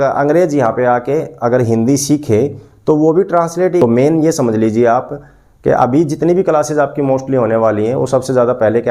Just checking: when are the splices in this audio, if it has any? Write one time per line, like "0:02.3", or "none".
0:03.8